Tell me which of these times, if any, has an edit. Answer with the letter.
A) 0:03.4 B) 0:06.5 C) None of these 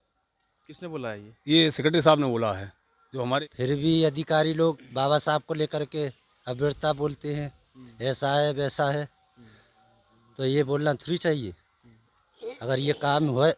A